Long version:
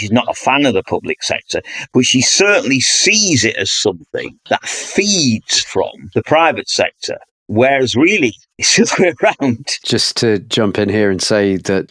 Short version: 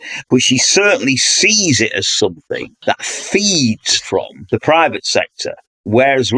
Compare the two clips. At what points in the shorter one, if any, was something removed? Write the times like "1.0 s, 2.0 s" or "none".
none